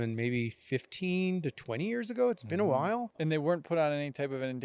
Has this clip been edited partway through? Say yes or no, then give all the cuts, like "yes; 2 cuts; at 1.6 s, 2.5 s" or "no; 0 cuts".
yes; 1 cut; at 3.1 s